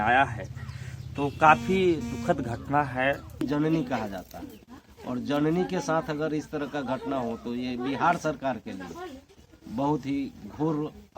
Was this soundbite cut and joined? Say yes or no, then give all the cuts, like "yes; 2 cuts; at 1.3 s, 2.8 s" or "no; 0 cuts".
yes; 1 cut; at 3.4 s